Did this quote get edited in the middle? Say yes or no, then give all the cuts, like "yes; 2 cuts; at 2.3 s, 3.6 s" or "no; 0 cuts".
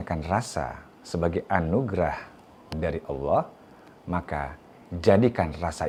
no; 0 cuts